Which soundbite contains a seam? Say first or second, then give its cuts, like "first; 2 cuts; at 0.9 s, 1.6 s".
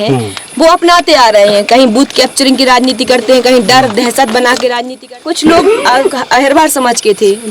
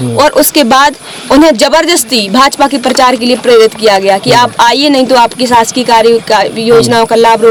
first; 1 cut; at 4.8 s